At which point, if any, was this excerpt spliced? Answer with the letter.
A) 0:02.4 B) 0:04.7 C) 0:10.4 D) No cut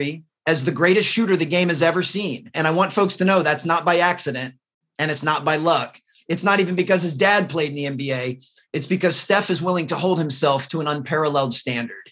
A